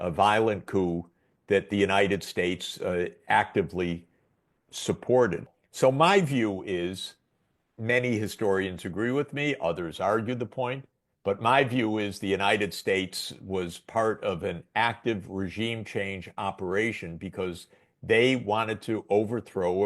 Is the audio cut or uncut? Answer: cut